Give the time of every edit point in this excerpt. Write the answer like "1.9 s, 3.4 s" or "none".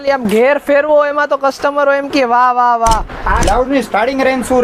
3.4 s